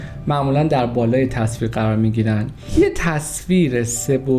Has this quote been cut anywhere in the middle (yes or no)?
yes